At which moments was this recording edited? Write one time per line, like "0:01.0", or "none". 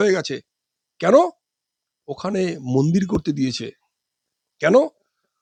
none